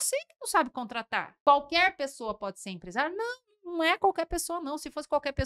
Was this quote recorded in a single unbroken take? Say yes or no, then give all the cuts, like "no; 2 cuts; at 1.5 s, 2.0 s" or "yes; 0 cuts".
no; 1 cut; at 1.2 s